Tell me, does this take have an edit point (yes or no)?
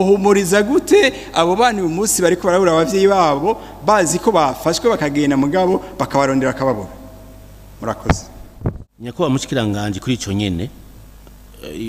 yes